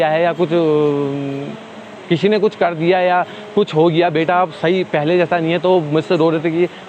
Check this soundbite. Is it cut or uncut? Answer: uncut